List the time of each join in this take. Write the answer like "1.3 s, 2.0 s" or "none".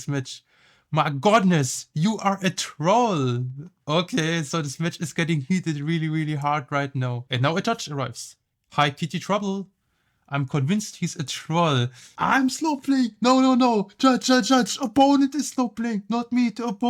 7.2 s, 12.0 s